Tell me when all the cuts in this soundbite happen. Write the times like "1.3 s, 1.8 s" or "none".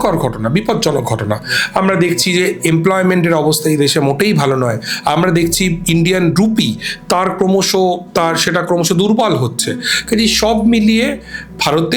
none

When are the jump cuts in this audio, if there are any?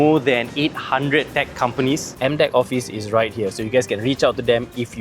2.1 s

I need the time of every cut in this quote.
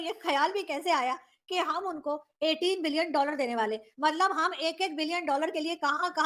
none

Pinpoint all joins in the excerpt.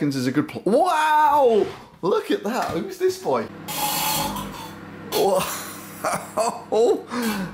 3.6 s

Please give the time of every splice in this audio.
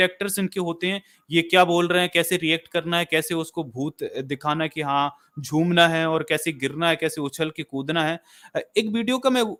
none

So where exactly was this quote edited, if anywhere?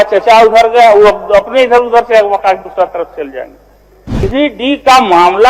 4.2 s

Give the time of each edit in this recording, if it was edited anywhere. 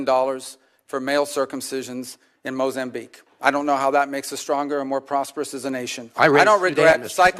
none

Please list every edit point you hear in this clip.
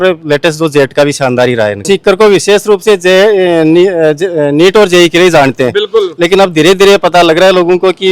1.8 s

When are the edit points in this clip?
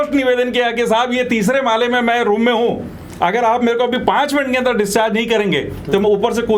none

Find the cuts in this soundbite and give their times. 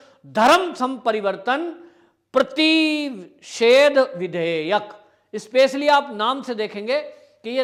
none

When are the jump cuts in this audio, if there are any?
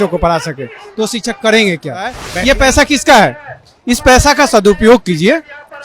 2.3 s

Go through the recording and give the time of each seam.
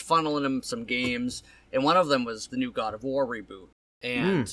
2.4 s

